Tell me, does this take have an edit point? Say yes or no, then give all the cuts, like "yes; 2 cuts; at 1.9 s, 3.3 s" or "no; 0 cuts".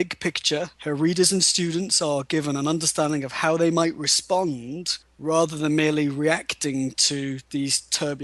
no; 0 cuts